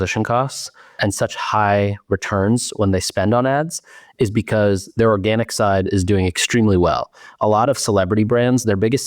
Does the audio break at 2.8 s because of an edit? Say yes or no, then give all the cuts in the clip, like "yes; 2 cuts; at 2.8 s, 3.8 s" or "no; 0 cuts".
no; 1 cut; at 1.0 s